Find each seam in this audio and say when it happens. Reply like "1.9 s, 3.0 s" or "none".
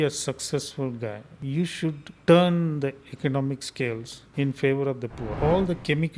1.7 s, 4.2 s, 5.3 s